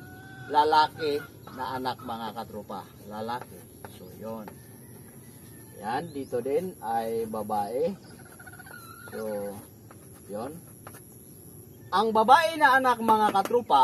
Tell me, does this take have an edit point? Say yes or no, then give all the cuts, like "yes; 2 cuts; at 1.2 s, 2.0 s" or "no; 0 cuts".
no; 0 cuts